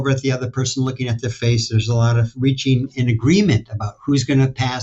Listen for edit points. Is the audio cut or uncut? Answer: uncut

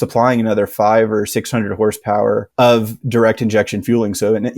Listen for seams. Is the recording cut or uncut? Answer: uncut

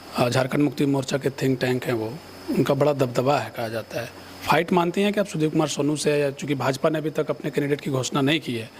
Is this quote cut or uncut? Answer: uncut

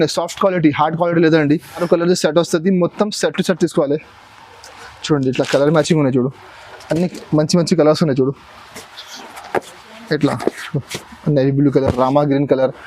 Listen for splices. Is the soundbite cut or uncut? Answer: cut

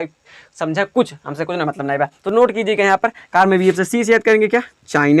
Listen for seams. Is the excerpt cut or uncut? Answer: uncut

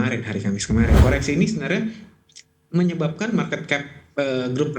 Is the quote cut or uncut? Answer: cut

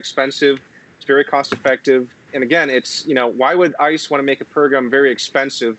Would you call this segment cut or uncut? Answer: uncut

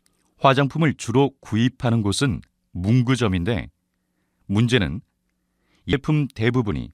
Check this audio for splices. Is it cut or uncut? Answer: cut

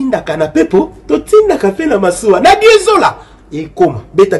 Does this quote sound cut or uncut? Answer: uncut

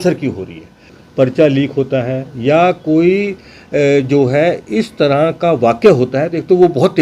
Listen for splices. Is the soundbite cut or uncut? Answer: cut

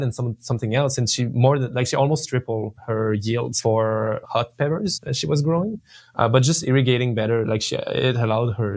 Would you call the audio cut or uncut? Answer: cut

